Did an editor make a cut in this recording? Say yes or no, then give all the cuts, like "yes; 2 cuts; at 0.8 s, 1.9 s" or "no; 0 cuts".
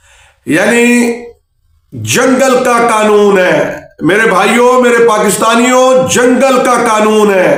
no; 0 cuts